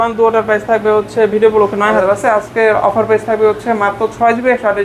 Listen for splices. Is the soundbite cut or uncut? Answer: cut